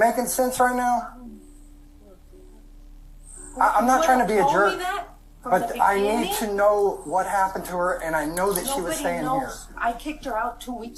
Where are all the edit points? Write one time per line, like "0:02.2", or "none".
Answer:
none